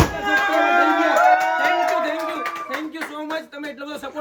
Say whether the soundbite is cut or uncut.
uncut